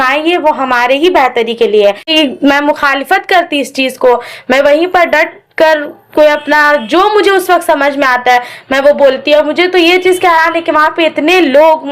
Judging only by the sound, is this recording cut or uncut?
cut